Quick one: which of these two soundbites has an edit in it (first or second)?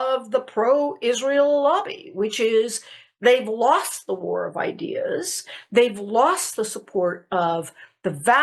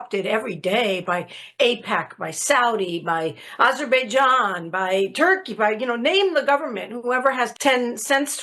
second